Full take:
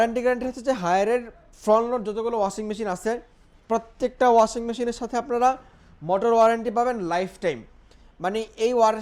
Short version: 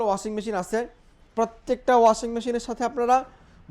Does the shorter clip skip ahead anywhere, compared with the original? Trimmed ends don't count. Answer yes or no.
no